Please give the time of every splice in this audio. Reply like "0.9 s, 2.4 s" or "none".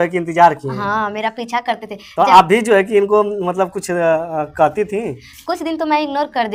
none